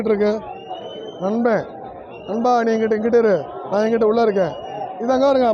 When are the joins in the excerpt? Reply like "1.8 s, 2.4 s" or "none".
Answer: none